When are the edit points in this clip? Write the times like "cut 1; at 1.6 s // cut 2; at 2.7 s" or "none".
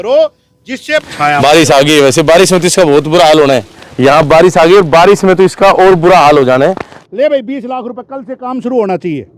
cut 1; at 1.1 s // cut 2; at 7.0 s